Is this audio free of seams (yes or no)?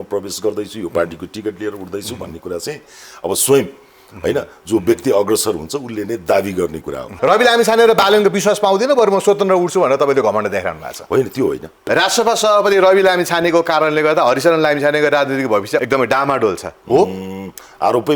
no